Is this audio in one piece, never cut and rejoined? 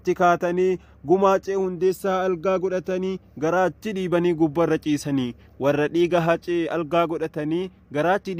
yes; 0 cuts

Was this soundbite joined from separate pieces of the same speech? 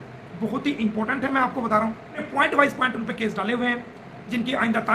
yes; 1 cut; at 2.2 s

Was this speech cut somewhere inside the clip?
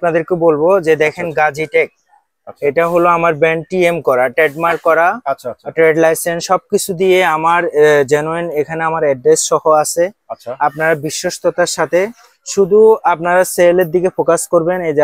no; 0 cuts

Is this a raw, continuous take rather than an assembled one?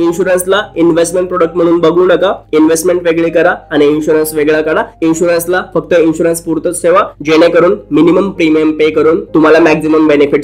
yes; 0 cuts

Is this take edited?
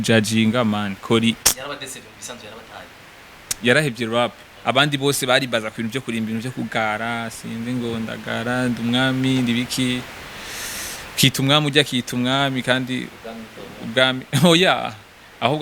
yes; 1 cut; at 4.5 s

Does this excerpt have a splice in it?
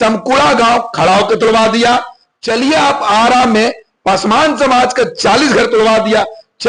no; 0 cuts

